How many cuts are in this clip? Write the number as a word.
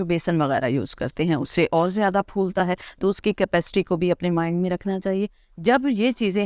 zero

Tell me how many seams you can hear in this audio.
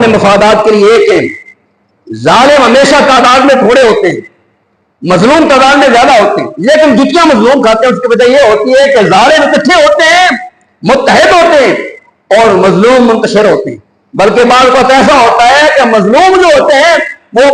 zero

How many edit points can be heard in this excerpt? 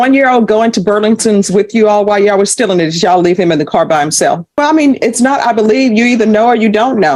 one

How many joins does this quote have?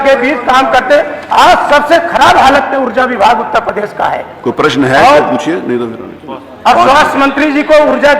zero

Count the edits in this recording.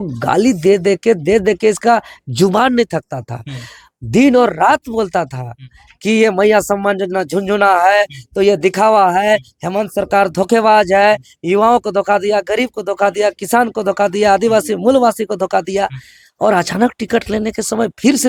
zero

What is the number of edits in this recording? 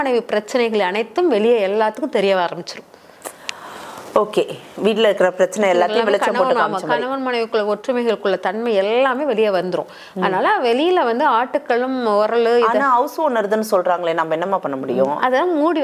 zero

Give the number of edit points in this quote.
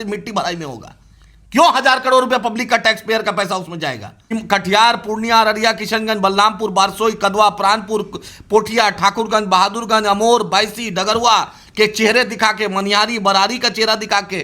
one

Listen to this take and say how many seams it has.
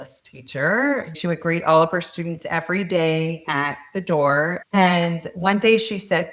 two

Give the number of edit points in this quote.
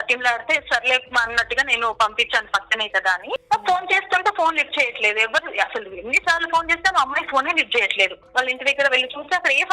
two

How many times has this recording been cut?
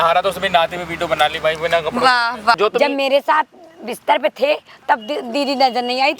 one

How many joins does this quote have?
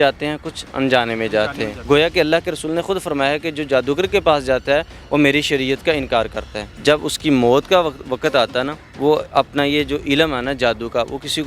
three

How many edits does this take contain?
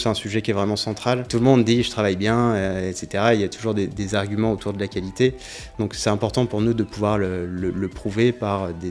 one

